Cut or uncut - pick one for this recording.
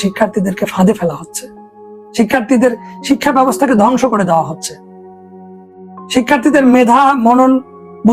uncut